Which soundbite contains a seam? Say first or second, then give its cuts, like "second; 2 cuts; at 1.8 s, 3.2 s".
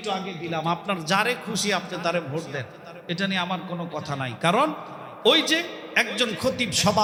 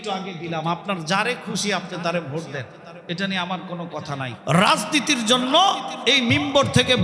second; 1 cut; at 4.3 s